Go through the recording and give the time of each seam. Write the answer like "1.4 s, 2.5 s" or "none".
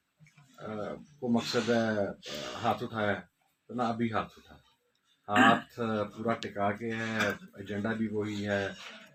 none